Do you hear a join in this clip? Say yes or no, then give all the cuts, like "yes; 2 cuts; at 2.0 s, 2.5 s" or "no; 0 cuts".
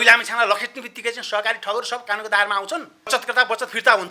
yes; 1 cut; at 3.1 s